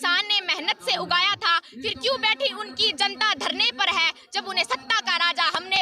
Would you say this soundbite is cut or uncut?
uncut